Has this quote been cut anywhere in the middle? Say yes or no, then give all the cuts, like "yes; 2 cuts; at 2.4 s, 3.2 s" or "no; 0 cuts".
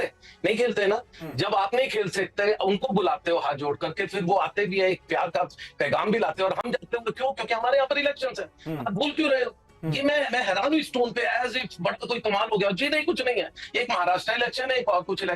no; 0 cuts